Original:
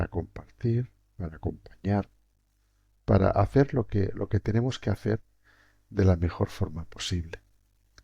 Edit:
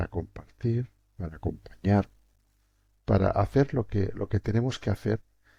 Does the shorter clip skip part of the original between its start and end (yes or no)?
no